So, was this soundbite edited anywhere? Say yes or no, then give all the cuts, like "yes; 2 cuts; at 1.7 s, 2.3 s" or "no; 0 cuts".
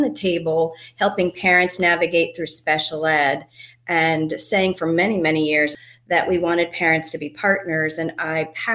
yes; 1 cut; at 5.8 s